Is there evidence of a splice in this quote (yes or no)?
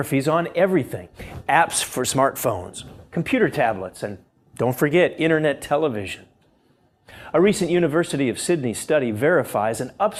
no